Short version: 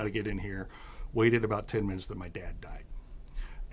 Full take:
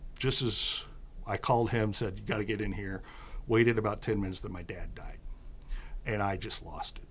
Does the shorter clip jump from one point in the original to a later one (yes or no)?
no